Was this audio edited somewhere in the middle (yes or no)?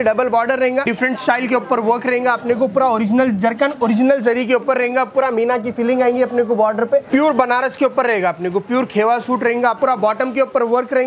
yes